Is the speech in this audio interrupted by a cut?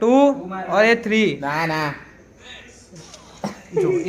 no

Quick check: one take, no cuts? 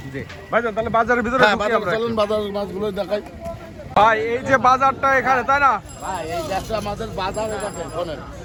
yes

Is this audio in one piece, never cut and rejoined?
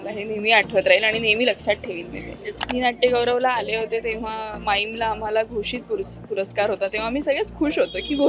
no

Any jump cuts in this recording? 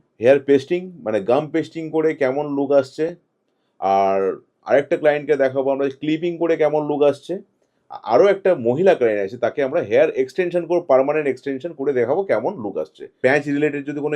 yes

